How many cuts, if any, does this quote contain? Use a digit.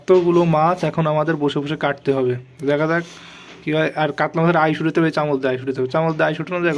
1